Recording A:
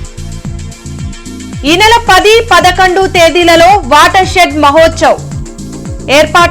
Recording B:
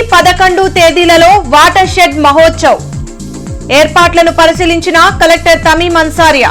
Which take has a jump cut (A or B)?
A